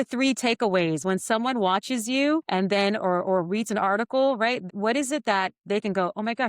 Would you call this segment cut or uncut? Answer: cut